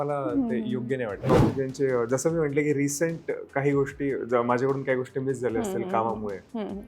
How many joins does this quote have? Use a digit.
1